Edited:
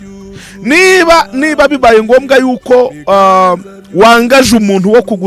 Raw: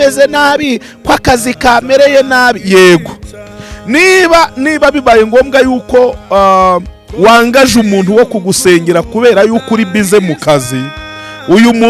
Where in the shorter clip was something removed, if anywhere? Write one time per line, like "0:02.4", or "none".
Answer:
none